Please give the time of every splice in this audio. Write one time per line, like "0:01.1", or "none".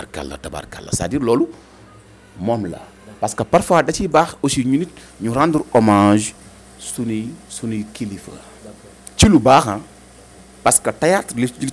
none